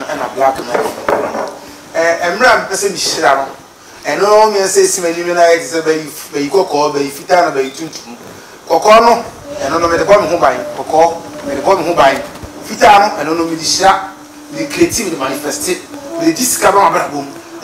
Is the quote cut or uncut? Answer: uncut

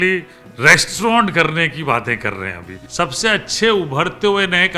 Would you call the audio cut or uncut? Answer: cut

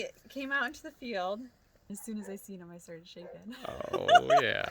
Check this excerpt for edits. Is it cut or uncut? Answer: cut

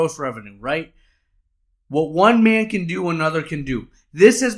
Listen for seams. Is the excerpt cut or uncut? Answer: uncut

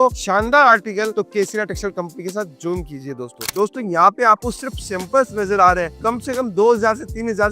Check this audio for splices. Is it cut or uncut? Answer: cut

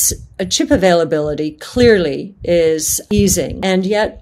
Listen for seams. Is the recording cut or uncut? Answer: cut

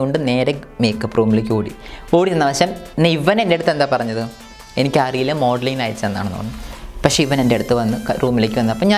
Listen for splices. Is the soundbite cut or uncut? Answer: uncut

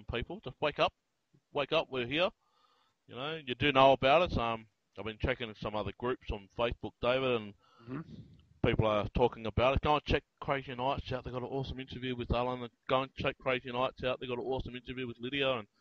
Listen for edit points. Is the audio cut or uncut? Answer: cut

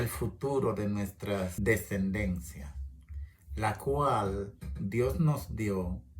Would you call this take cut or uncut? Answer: cut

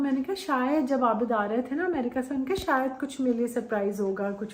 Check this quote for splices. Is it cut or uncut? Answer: uncut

